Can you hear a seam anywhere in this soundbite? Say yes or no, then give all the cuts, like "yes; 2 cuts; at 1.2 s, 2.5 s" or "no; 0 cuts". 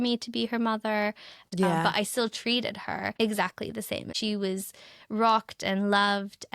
yes; 3 cuts; at 1.3 s, 3.1 s, 4.1 s